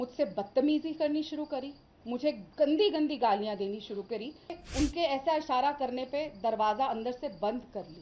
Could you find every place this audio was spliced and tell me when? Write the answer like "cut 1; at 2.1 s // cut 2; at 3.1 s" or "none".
cut 1; at 4.6 s